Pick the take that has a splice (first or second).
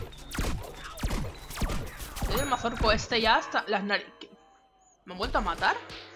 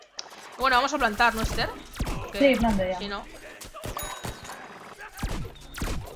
first